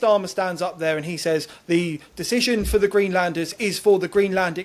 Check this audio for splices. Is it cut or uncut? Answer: uncut